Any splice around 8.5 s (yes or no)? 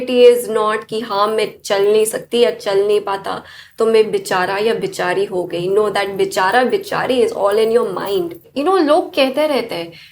yes